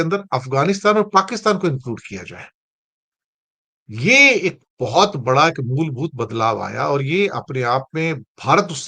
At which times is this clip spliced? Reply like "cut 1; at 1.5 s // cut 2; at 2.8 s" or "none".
none